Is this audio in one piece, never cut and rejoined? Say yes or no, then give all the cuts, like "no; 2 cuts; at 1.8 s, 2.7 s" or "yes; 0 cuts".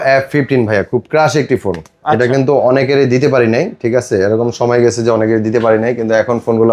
yes; 0 cuts